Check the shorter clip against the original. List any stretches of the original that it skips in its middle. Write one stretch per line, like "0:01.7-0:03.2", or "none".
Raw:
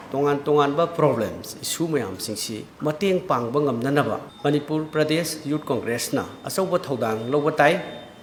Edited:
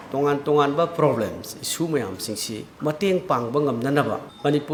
none